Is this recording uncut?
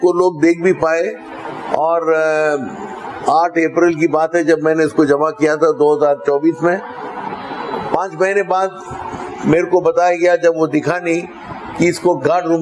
yes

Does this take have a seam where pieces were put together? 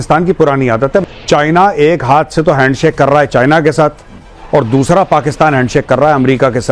yes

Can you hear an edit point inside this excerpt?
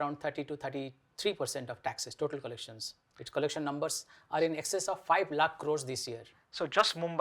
no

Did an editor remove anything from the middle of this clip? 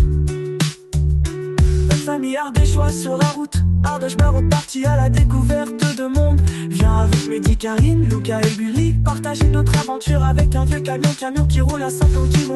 no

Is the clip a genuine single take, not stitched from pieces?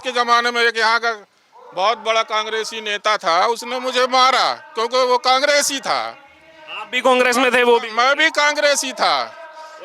yes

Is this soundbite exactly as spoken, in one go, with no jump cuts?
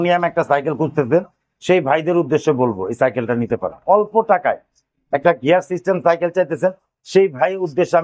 no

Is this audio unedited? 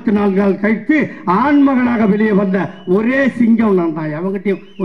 yes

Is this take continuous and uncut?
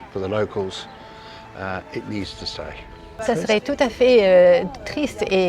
no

